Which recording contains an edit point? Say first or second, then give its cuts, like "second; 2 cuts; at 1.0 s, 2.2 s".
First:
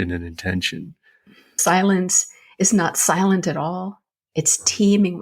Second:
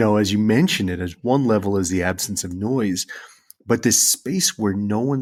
first; 1 cut; at 1.6 s